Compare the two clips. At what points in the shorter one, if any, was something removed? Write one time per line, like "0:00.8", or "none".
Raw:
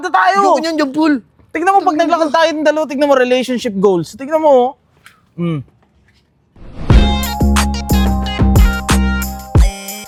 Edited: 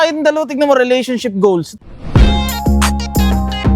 0:01.7